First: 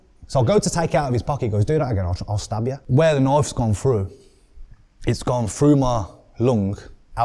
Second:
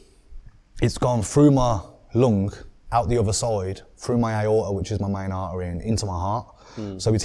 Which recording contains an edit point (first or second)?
first